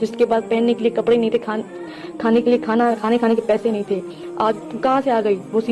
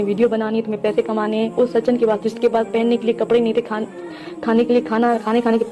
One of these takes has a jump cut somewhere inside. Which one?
first; 1 cut; at 4.6 s

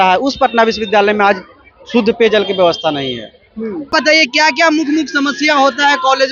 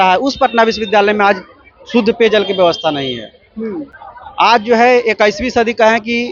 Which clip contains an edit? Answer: first; 1 cut; at 3.9 s

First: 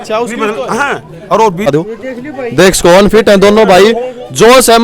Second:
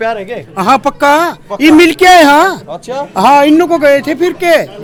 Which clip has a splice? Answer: first; 1 cut; at 1.7 s

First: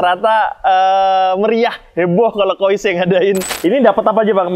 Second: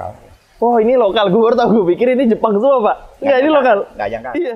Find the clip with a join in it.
first; 1 cut; at 3.5 s

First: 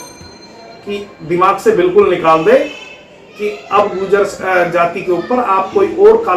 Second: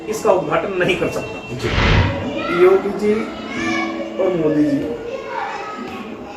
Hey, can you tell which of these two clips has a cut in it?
second; 1 cut; at 2.0 s

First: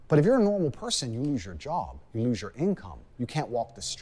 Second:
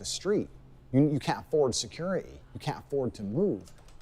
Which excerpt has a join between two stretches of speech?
second; 1 cut; at 1.2 s

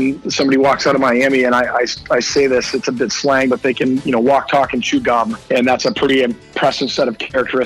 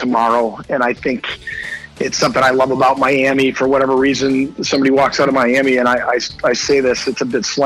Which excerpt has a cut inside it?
first; 1 cut; at 5.4 s

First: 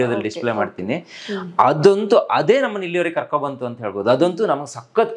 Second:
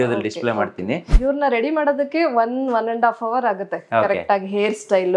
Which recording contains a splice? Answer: second; 1 cut; at 1.1 s

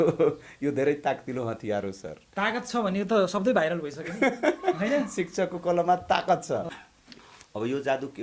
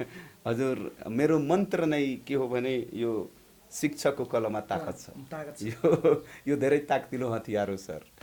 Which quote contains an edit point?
first; 1 cut; at 6.7 s

